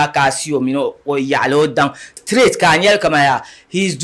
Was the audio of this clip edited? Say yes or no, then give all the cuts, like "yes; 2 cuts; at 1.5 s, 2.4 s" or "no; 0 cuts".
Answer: yes; 1 cut; at 2.1 s